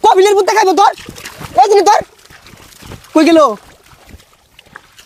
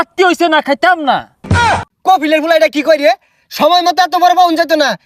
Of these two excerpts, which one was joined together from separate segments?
second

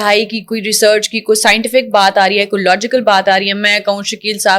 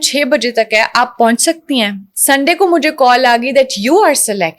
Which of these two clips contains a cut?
second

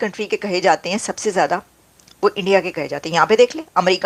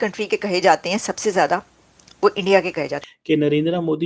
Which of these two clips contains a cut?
second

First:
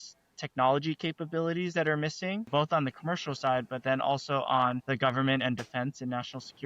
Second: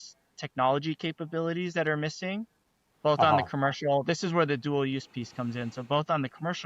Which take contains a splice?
first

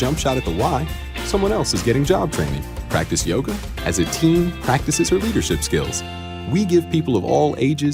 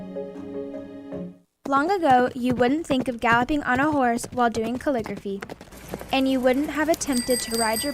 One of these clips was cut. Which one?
second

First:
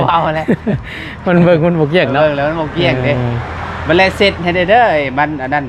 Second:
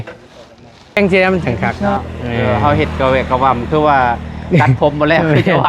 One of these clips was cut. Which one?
second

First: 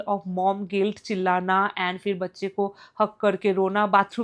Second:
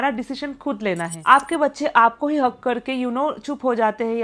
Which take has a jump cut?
second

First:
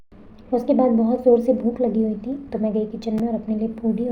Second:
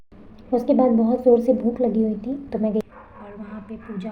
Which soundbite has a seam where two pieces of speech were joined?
second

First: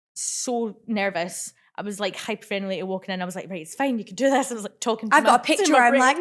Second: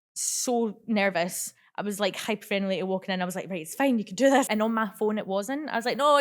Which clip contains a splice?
second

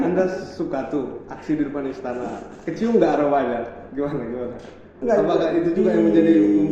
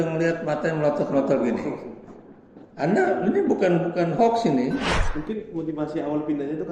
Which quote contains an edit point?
second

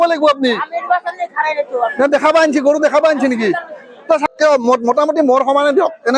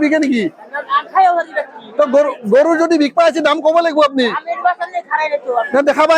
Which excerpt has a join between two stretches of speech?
first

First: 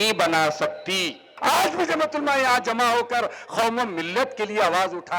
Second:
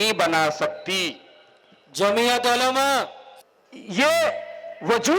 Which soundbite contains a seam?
first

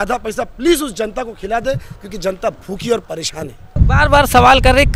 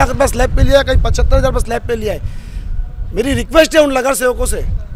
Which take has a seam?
first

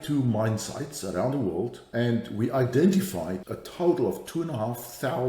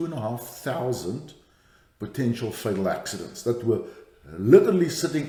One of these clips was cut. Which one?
first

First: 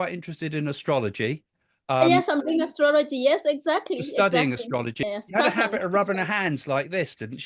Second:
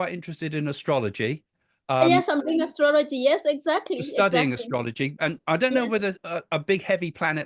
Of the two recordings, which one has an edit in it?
first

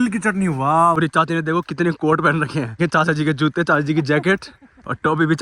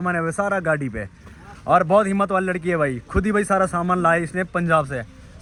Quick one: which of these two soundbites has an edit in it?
first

